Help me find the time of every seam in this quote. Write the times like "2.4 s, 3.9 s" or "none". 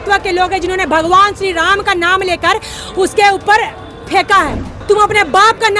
4.6 s